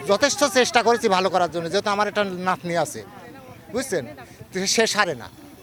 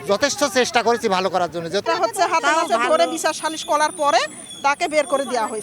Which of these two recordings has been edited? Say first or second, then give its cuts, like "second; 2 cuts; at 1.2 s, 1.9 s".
second; 1 cut; at 1.8 s